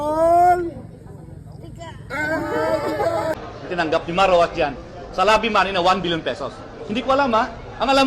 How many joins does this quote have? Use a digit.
1